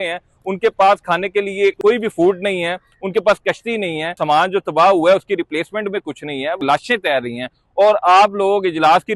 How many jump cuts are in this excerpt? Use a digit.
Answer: 3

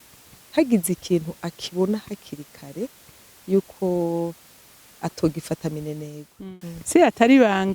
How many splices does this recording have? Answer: 1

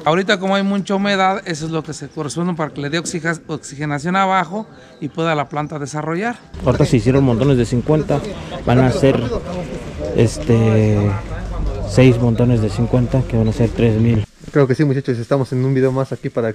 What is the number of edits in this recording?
2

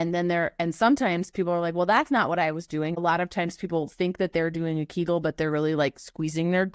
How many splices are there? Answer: 1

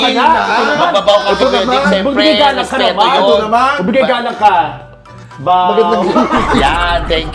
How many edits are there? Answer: 0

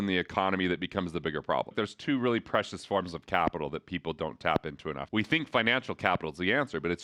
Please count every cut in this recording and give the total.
2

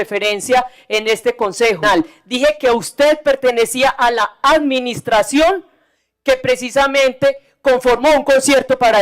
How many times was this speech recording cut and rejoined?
1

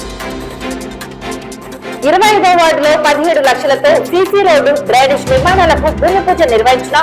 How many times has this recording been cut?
1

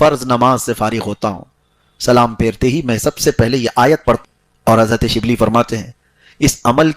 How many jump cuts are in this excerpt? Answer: 1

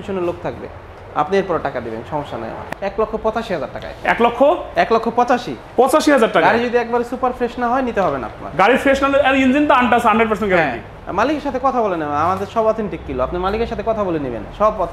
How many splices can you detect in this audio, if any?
1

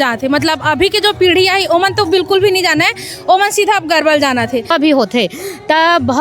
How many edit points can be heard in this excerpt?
1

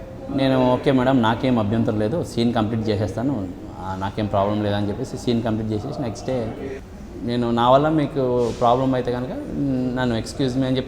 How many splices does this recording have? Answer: 1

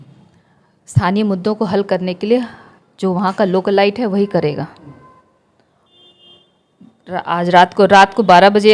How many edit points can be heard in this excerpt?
0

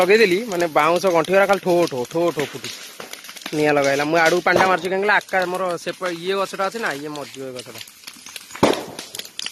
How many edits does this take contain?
0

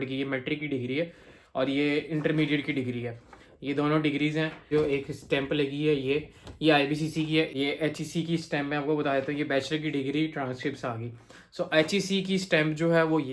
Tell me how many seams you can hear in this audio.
2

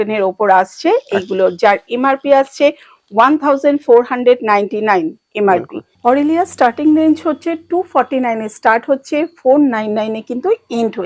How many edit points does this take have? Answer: 0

